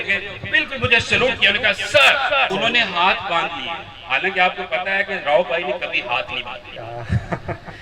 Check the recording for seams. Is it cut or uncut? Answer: cut